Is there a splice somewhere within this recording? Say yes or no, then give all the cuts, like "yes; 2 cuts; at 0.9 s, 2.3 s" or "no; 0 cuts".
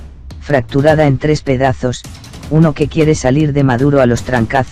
yes; 1 cut; at 2.1 s